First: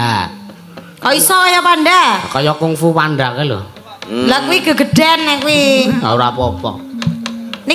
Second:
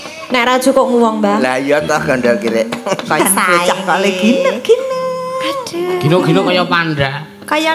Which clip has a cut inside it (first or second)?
second